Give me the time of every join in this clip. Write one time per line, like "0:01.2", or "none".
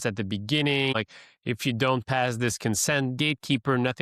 0:00.9